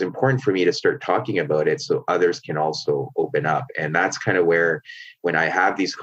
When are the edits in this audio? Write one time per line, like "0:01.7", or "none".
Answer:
none